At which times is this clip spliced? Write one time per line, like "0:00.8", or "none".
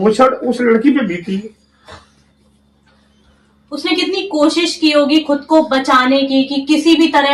none